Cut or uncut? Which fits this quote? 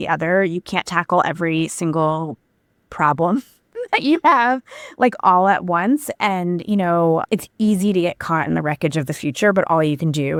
uncut